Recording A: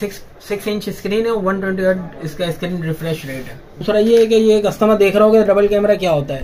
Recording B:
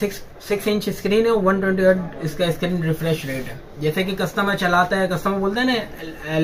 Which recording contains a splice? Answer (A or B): A